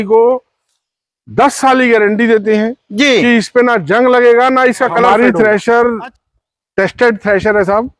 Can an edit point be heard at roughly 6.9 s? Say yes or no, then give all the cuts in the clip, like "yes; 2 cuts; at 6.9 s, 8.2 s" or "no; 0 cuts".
no; 1 cut; at 5.1 s